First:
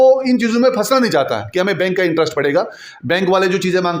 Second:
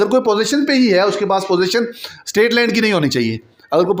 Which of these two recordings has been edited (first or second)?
first